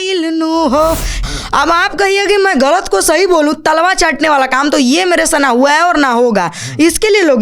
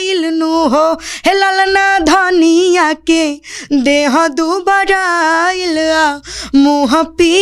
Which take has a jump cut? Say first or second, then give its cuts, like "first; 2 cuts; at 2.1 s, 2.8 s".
first; 1 cut; at 1.2 s